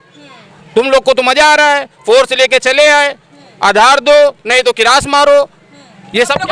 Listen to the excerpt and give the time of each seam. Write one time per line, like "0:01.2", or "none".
none